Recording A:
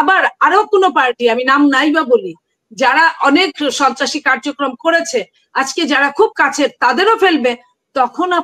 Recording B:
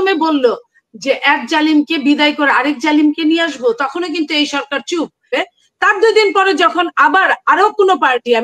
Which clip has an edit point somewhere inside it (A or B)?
B